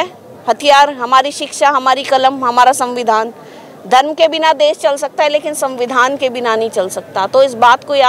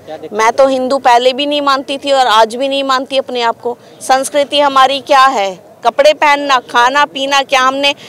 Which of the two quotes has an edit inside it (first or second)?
second